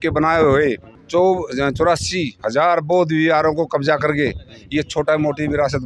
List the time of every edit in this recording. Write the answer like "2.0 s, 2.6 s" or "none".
none